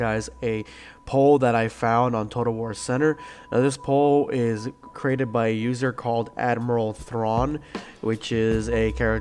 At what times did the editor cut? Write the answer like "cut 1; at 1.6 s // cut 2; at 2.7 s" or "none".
cut 1; at 4.6 s